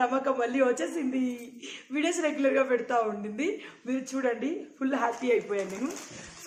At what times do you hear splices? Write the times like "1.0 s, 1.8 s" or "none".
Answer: none